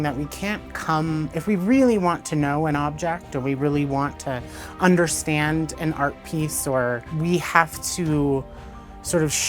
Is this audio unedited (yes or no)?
no